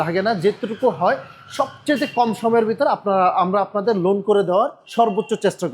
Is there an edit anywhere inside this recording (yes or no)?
yes